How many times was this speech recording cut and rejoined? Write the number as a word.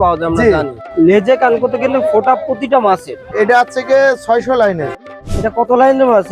three